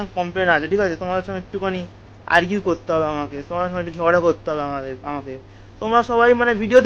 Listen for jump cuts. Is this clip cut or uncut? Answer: uncut